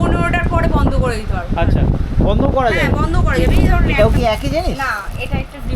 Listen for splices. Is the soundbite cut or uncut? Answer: cut